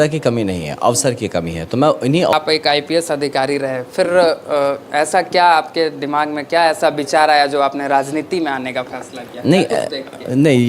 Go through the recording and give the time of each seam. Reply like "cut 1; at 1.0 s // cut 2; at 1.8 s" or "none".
cut 1; at 2.3 s